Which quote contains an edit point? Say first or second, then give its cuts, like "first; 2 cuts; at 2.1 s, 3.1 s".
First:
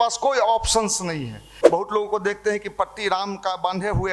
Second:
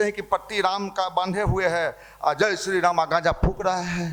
first; 1 cut; at 1.5 s